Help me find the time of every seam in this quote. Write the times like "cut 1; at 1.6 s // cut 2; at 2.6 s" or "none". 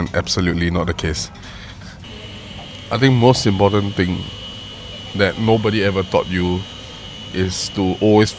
cut 1; at 2.1 s